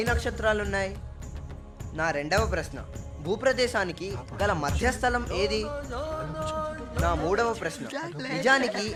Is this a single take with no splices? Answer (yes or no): yes